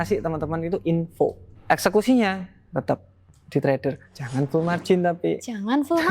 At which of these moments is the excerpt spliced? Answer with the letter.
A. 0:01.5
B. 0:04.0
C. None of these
A